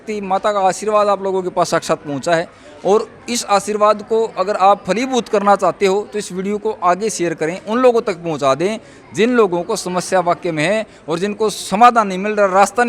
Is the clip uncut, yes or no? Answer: yes